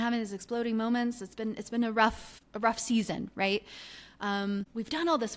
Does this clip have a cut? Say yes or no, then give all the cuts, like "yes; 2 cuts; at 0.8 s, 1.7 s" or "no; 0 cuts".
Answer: no; 0 cuts